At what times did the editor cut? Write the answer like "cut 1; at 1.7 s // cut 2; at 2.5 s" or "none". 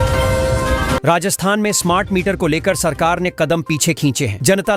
cut 1; at 1.0 s

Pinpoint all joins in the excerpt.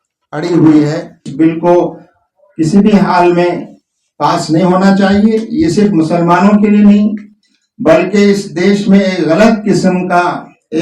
cut 1; at 1.3 s

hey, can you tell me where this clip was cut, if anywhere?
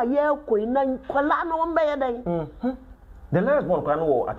none

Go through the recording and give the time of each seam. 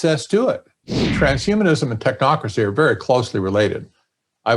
cut 1; at 1.1 s

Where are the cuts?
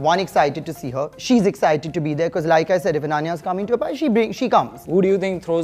cut 1; at 1.2 s // cut 2; at 4.8 s

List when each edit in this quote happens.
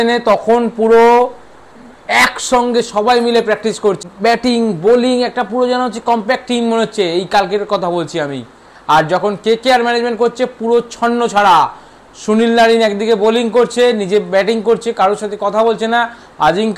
cut 1; at 4.0 s

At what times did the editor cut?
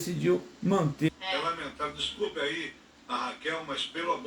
cut 1; at 1.1 s

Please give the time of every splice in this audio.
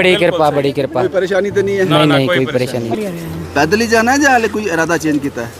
cut 1; at 3.0 s

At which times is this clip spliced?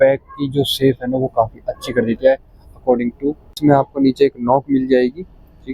cut 1; at 3.6 s

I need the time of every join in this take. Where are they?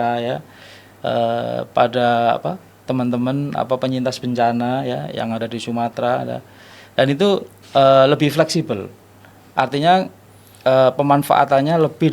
none

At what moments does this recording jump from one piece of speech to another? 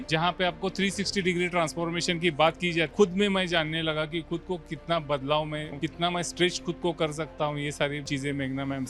cut 1; at 2.9 s // cut 2; at 5.7 s // cut 3; at 8.0 s

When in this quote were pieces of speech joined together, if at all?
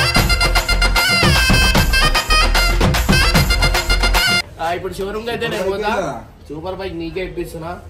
cut 1; at 4.5 s

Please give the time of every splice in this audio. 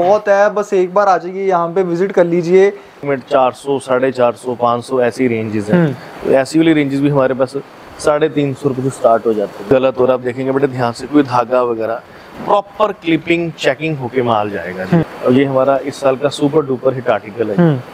cut 1; at 3.0 s // cut 2; at 9.6 s // cut 3; at 15.1 s

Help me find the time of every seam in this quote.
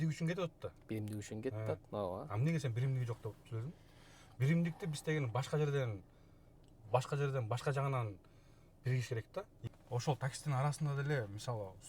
cut 1; at 9.6 s

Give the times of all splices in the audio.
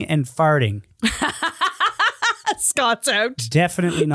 none

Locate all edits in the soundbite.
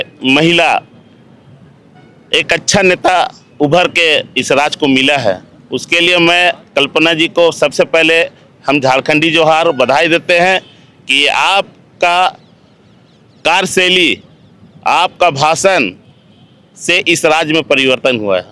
none

